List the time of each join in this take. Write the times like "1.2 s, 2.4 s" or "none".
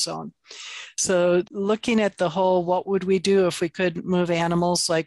1.5 s

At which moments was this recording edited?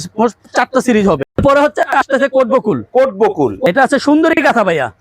1.2 s, 3.6 s

